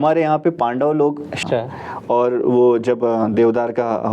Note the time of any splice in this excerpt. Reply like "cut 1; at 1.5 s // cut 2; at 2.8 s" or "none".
cut 1; at 1.4 s